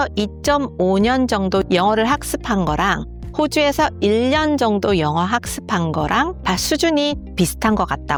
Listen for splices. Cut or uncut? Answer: uncut